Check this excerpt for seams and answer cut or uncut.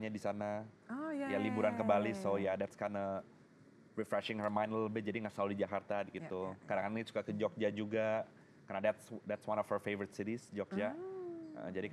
uncut